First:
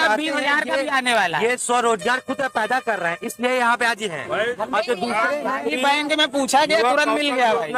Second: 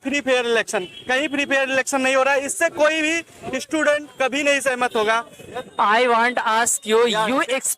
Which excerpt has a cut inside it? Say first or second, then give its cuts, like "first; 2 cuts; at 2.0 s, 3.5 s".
second; 1 cut; at 5.6 s